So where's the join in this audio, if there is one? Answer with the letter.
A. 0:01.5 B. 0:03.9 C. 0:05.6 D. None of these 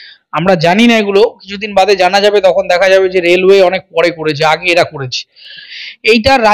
C